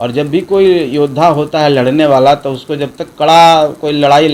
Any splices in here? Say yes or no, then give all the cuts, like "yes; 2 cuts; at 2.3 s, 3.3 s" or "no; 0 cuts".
no; 0 cuts